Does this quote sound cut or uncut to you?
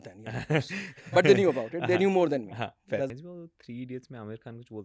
cut